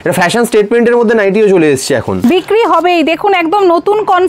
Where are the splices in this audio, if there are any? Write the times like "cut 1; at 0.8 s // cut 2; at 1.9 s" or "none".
cut 1; at 2.1 s